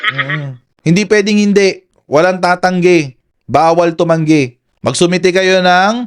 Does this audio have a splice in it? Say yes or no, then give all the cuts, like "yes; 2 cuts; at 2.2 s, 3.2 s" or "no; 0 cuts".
no; 0 cuts